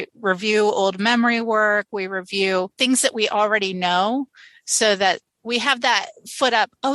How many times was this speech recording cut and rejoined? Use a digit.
1